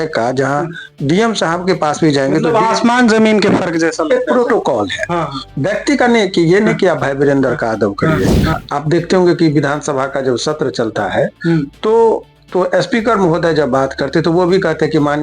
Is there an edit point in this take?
yes; 1 cut; at 8.6 s

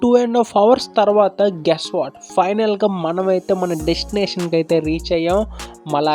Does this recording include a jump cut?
no; 0 cuts

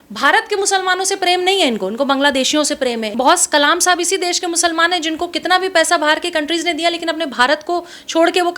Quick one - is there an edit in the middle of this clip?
yes; 1 cut; at 3.1 s

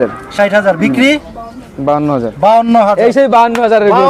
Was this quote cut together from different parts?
no; 0 cuts

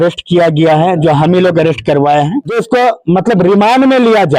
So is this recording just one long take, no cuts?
no; 1 cut; at 2.6 s

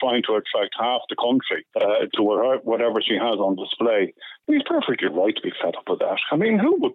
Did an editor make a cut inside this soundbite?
yes; 2 cuts; at 1.6 s, 4.3 s

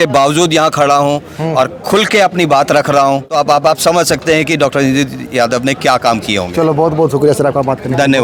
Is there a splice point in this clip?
no; 0 cuts

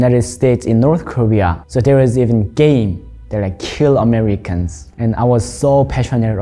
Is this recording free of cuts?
no; 1 cut; at 1.6 s

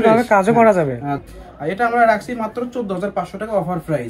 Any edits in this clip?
yes; 1 cut; at 1.2 s

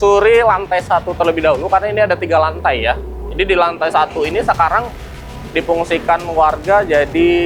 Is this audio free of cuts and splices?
yes; 0 cuts

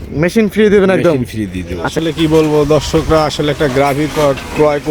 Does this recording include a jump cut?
yes; 1 cut; at 1.9 s

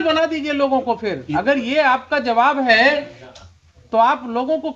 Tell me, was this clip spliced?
no; 0 cuts

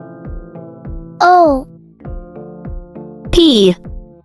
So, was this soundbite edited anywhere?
yes; 1 cut; at 1.2 s

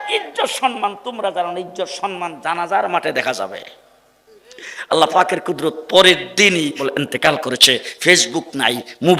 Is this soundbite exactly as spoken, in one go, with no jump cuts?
no; 1 cut; at 6.8 s

